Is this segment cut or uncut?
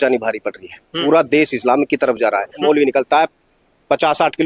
cut